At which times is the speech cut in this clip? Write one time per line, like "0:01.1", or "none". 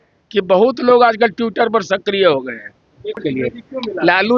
0:03.2